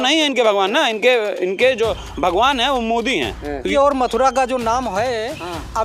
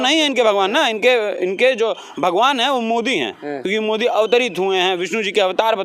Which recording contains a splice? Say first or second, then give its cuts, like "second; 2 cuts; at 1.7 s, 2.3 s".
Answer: first; 1 cut; at 3.6 s